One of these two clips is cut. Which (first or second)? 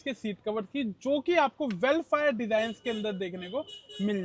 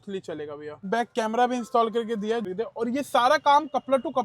second